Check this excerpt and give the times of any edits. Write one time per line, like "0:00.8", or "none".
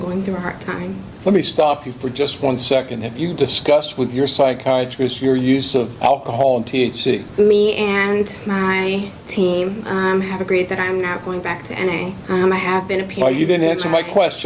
0:01.1
0:05.9
0:07.3
0:12.2